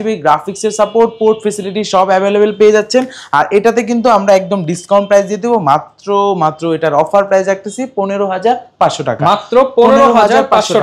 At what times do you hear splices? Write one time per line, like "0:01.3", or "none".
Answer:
none

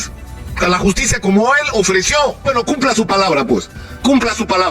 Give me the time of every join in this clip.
0:02.4

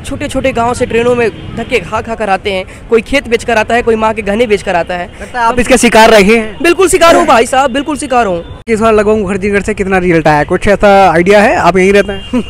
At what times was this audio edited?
0:08.7

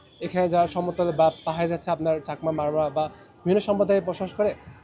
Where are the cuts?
none

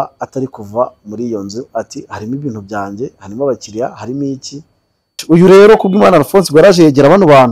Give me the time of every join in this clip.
0:05.1

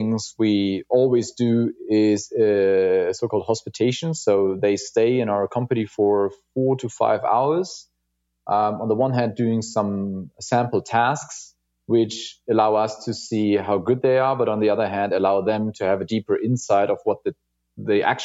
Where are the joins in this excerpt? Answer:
none

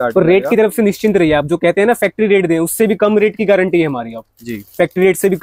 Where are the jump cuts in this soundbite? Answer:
none

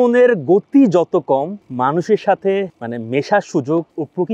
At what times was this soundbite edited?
none

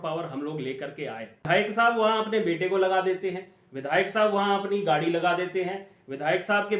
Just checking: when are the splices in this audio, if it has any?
0:01.3

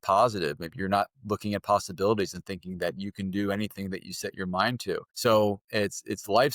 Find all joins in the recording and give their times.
0:05.1

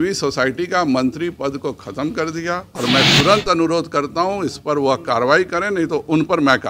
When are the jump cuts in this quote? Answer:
0:02.7

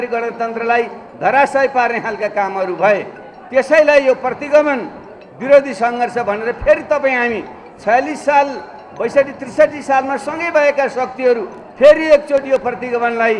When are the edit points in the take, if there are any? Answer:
none

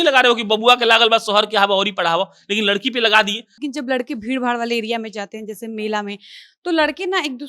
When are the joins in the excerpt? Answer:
0:03.6

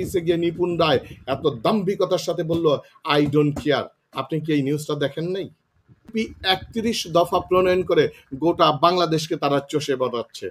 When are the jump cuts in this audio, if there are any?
0:06.1

